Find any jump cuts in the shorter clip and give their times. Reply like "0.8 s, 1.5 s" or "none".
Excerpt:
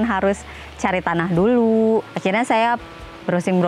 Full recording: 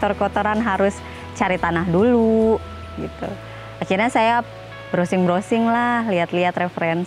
2.1 s